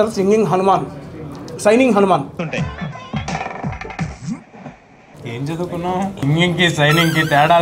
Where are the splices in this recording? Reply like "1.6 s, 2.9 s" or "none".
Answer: 2.4 s, 5.1 s, 6.2 s

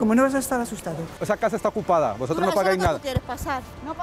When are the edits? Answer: 1.2 s

